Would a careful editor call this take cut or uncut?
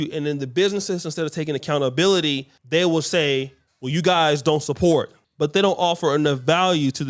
cut